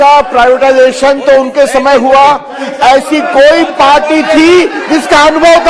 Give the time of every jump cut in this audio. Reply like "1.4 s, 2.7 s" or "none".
none